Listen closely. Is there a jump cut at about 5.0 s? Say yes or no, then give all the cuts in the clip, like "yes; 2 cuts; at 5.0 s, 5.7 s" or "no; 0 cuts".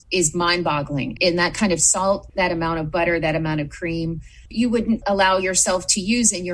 yes; 1 cut; at 5.0 s